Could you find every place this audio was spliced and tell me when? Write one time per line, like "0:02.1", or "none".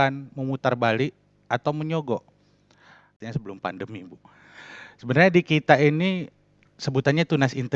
0:03.2